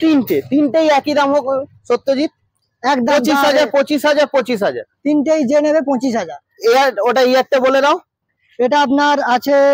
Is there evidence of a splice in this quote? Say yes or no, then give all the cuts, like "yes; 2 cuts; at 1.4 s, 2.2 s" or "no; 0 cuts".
no; 0 cuts